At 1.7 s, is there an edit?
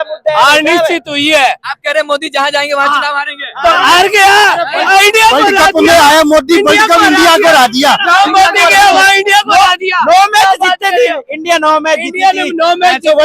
yes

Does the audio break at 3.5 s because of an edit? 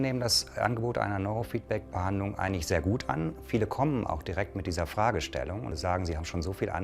no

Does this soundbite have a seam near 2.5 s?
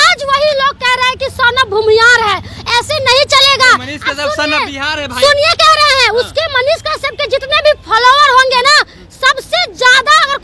no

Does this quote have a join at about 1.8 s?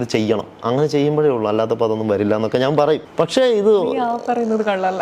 no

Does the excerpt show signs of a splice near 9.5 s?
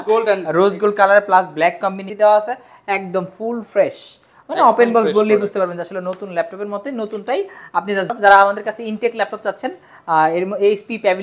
no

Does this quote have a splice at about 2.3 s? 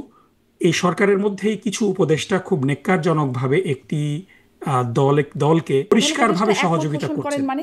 no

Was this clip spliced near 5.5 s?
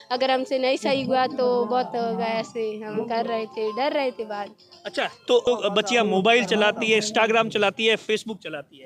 yes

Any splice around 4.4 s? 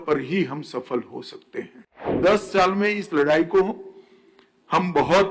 no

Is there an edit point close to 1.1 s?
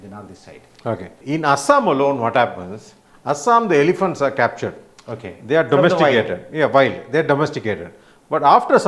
yes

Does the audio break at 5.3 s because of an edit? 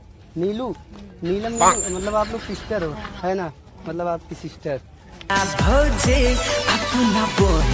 yes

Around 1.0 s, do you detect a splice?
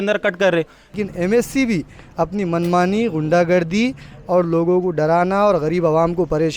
yes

